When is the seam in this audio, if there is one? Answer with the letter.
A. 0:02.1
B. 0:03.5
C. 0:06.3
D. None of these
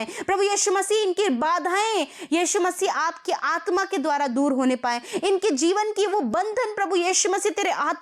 D